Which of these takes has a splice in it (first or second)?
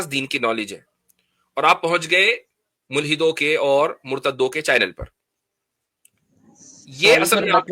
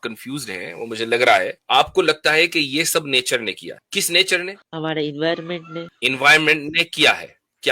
second